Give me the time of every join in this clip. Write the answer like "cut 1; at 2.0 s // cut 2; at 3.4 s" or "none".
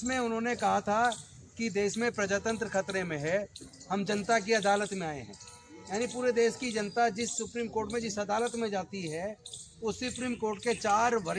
none